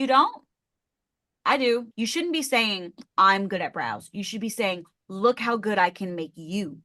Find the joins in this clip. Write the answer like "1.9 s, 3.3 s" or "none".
1.9 s

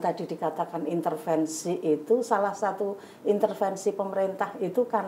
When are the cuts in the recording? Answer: none

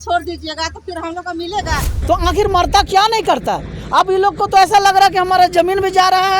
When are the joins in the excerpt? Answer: 1.9 s

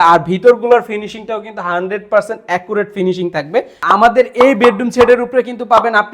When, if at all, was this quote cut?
3.8 s

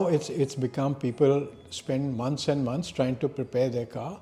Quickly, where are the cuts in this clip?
none

